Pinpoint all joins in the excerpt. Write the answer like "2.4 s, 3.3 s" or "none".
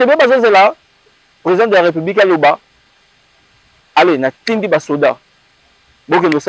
none